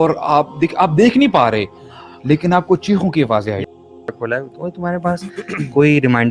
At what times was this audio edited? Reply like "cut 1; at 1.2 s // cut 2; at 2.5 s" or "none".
cut 1; at 4.0 s